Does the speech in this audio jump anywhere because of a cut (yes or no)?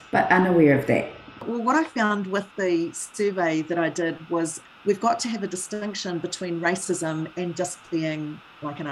no